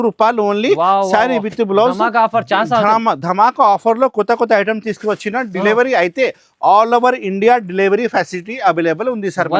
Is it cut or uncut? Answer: uncut